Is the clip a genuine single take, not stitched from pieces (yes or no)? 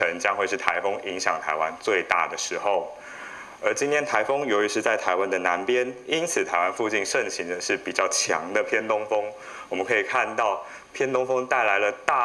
yes